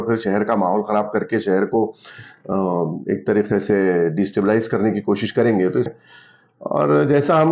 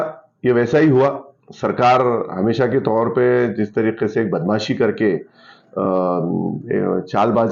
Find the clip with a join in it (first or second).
first